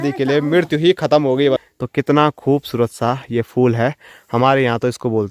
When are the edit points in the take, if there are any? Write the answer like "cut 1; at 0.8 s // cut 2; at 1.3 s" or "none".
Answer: cut 1; at 1.6 s

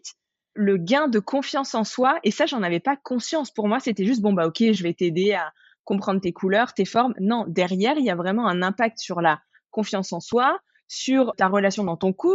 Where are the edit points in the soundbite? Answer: cut 1; at 11.3 s

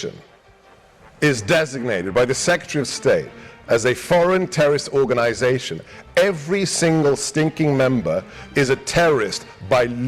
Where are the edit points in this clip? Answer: none

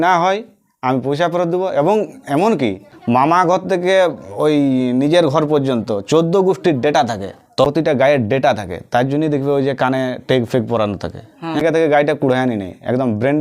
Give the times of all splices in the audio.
cut 1; at 2.9 s // cut 2; at 7.7 s // cut 3; at 11.6 s

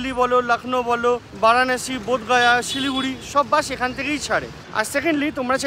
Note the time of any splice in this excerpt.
none

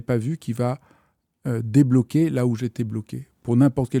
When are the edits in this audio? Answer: none

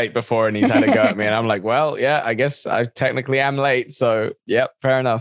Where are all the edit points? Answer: none

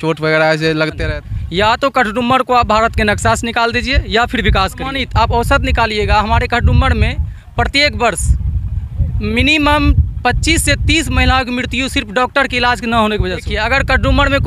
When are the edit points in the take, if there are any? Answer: cut 1; at 1.0 s // cut 2; at 5.0 s // cut 3; at 13.5 s

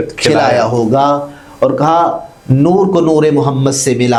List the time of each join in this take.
none

